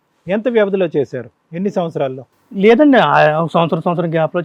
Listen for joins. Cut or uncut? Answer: uncut